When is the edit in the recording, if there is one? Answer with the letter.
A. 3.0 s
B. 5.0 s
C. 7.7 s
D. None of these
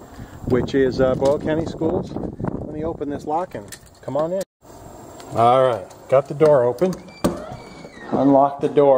A